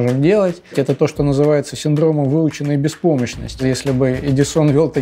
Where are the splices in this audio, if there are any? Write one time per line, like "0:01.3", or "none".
0:00.7
0:03.6